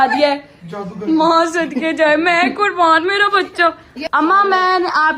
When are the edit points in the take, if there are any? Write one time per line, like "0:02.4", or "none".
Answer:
0:03.9